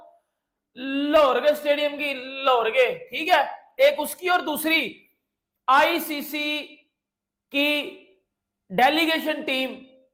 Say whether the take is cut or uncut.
uncut